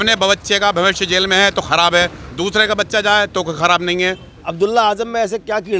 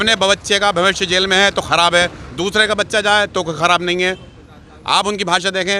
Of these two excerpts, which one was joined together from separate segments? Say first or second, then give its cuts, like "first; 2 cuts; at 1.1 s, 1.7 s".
first; 1 cut; at 4.4 s